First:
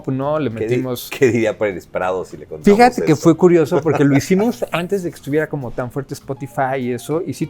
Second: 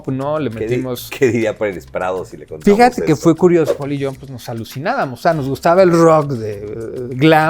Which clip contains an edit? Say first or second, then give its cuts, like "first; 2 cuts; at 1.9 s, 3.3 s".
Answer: second; 1 cut; at 3.7 s